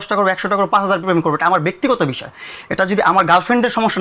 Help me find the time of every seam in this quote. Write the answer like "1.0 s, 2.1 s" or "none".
none